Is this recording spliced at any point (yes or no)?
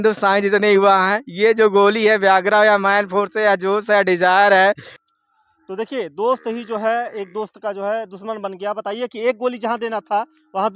no